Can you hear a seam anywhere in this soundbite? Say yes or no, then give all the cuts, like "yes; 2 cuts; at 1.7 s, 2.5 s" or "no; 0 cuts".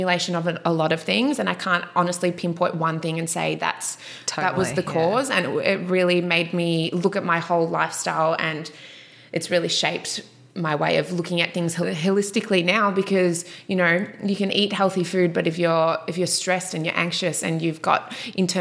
yes; 1 cut; at 11.8 s